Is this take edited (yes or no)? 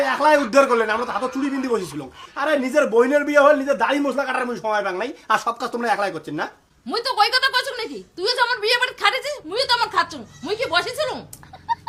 no